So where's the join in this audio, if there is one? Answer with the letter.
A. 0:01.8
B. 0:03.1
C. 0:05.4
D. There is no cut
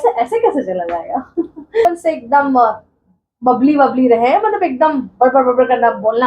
A